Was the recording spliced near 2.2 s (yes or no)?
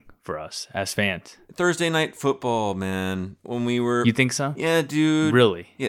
no